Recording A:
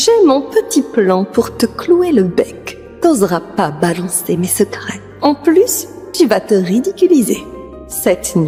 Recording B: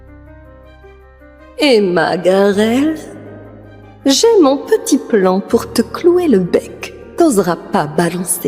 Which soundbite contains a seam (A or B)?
B